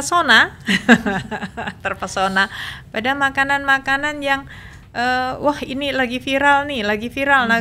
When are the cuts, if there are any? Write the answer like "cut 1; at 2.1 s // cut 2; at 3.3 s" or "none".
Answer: none